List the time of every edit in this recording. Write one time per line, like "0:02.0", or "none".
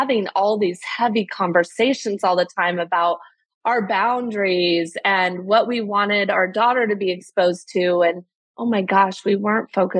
none

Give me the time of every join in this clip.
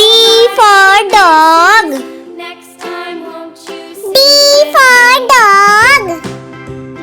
0:02.0
0:03.5
0:06.2

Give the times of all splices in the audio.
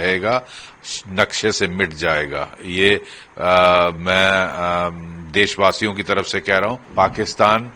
0:06.8

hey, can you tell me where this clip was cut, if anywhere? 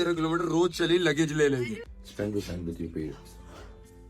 0:01.9

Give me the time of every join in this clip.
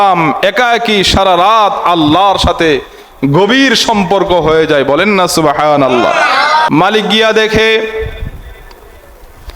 0:06.7

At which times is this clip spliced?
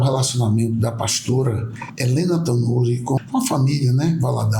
0:03.2

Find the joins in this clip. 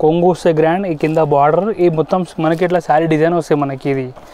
none

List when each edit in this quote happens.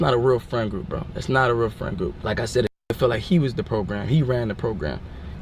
0:02.2

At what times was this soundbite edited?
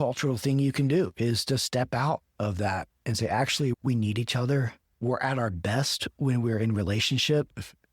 0:04.8

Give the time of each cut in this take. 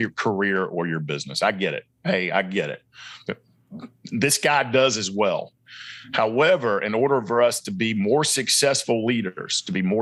none

